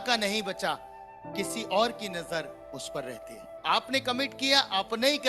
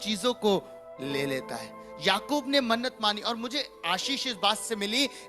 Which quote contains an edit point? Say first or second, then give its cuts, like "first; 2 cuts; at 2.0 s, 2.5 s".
first; 1 cut; at 3.4 s